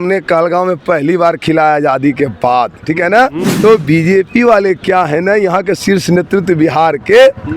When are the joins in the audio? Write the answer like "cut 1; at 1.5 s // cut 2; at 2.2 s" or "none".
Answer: cut 1; at 3.5 s